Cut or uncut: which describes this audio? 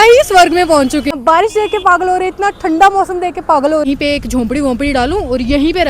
cut